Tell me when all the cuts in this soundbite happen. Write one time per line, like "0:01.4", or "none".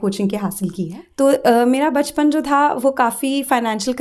0:01.0

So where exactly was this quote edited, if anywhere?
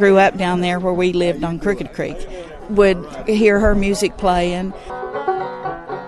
0:02.6
0:04.9

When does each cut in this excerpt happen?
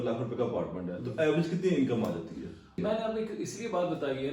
0:02.8

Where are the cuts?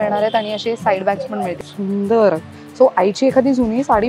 0:01.6

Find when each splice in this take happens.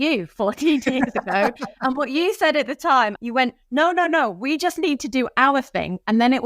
0:03.2

